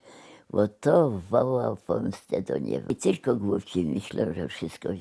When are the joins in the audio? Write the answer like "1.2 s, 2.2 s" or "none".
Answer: 2.9 s

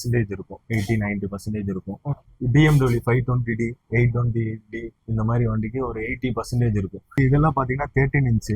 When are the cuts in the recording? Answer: 2.1 s, 7.2 s

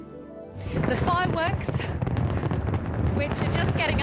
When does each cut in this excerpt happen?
2.3 s

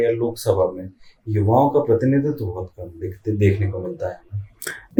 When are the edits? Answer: none

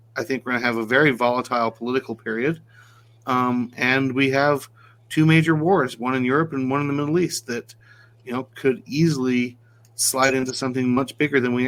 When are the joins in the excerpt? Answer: none

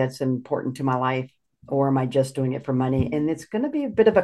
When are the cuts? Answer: none

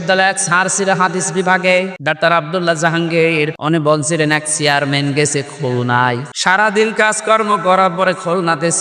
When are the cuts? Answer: 2.0 s, 3.6 s, 6.6 s

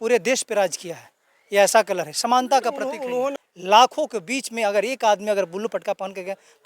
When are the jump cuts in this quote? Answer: 3.3 s

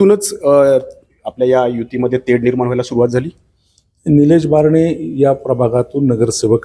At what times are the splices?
none

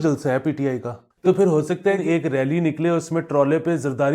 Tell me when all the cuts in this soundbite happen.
1.0 s, 2.0 s

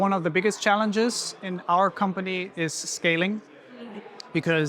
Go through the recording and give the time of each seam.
none

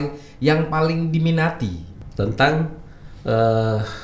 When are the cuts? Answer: 1.9 s

